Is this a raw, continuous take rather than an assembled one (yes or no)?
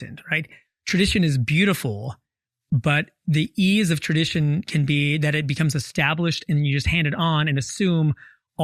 yes